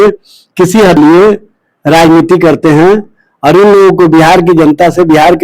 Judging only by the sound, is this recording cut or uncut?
cut